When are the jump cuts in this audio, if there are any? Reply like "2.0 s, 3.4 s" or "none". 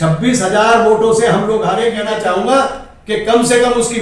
2.0 s